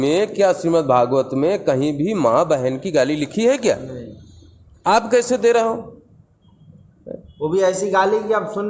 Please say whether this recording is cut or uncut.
uncut